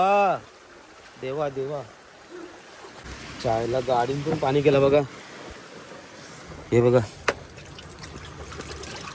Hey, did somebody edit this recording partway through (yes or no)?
yes